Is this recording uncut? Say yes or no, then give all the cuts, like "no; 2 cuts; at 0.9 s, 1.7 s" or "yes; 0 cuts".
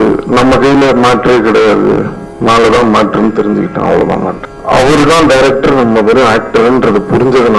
no; 1 cut; at 4.4 s